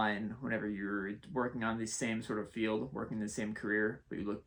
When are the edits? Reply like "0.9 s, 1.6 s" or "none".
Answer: none